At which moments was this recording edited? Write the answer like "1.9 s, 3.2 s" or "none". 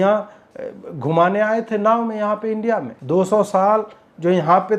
2.9 s